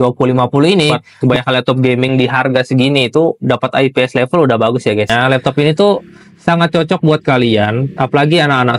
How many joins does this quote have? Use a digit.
2